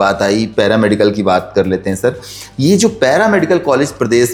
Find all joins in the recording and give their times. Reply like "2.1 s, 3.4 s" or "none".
none